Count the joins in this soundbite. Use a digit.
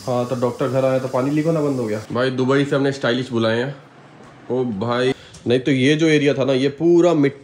2